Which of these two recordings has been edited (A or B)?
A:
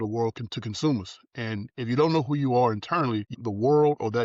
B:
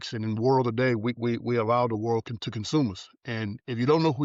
A